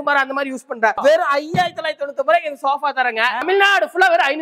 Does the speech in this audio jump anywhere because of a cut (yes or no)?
yes